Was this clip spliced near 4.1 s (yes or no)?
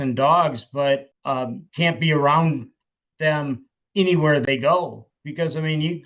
no